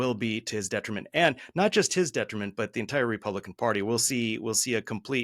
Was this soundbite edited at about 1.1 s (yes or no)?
no